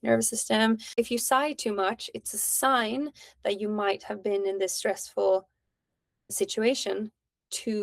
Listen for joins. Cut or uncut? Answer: cut